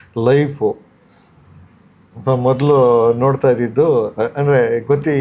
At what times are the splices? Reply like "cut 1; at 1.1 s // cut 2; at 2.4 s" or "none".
none